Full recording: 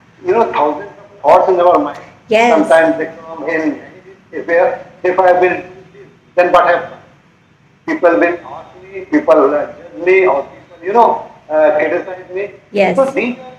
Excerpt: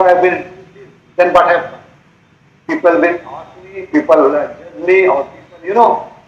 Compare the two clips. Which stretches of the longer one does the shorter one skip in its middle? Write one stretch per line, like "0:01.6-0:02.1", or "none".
none